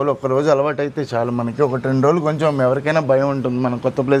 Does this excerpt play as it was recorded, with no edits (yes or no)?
yes